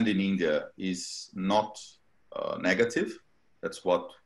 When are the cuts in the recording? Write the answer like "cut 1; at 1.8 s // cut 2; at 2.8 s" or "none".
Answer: none